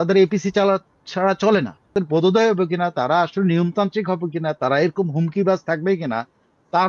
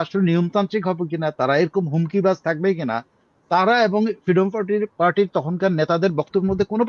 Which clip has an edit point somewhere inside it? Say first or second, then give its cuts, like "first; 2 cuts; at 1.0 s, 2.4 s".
first; 1 cut; at 1.9 s